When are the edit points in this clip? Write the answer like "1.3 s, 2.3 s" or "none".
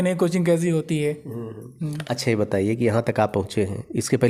none

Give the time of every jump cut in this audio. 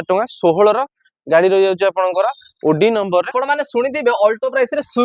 3.3 s

